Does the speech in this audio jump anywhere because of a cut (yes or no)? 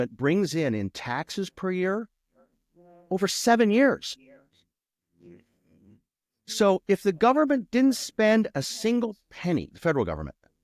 no